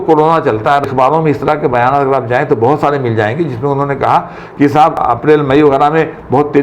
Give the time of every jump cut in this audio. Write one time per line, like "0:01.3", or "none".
0:00.9
0:05.0